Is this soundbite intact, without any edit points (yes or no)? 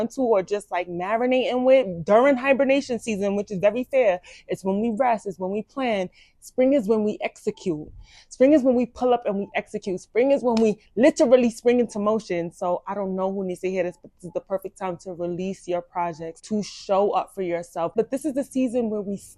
yes